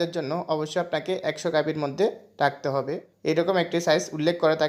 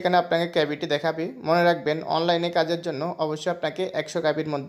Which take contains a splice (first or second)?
first